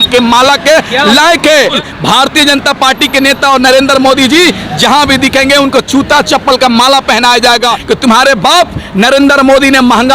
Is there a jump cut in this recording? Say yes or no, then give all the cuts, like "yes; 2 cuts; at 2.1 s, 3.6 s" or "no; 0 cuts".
yes; 2 cuts; at 1.8 s, 7.8 s